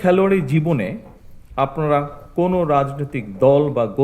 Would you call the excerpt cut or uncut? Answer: uncut